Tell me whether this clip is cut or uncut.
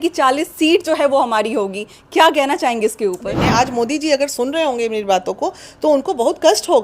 cut